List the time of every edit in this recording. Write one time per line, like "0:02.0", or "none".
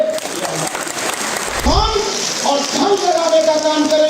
0:01.7

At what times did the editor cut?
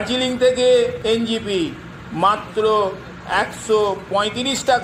0:01.0

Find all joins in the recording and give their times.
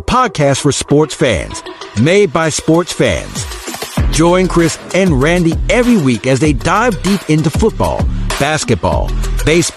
none

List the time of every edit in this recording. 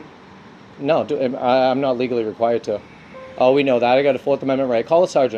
none

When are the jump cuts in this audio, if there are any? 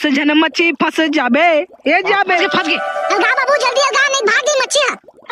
0:02.4

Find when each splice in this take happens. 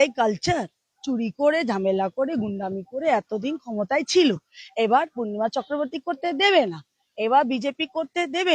none

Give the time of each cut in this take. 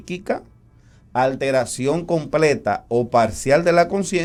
none

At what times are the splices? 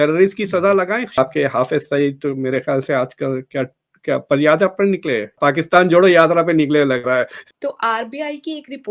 0:01.2
0:05.3
0:07.5

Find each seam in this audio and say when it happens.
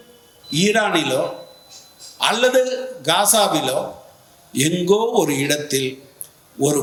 none

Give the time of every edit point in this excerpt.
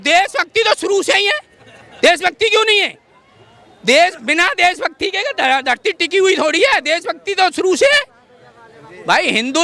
none

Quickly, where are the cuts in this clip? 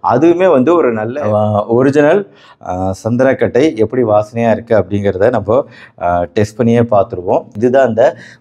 0:01.1

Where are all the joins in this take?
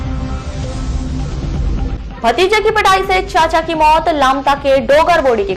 none

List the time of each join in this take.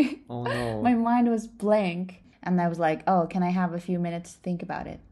0:02.3

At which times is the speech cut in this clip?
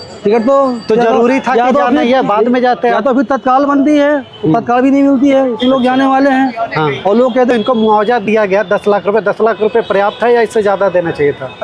0:07.5

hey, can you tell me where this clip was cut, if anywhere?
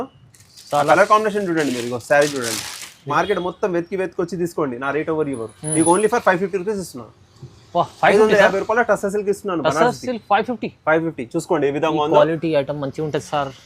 0:03.1

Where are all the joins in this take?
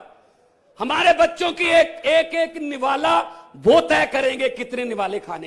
none

